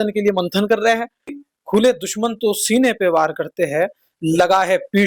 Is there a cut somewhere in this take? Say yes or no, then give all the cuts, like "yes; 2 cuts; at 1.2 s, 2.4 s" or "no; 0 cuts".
yes; 1 cut; at 1.4 s